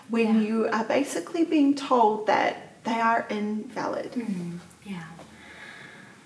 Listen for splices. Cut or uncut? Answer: uncut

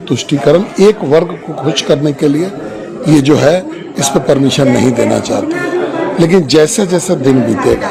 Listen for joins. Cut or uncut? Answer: uncut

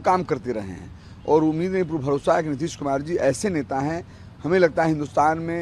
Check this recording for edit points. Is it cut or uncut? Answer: uncut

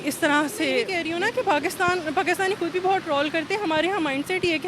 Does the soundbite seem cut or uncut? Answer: cut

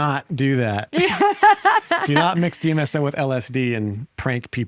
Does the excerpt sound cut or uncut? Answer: uncut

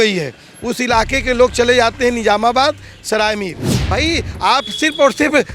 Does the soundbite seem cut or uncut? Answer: cut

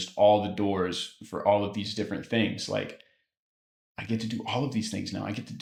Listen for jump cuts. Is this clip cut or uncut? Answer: uncut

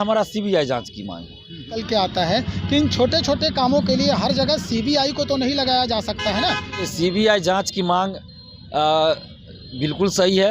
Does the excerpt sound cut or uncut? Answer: cut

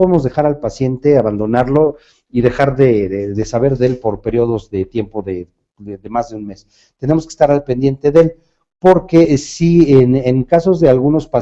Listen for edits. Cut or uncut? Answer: cut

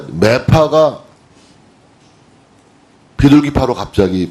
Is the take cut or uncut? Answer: cut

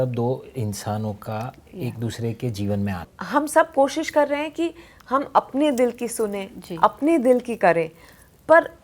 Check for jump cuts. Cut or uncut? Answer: cut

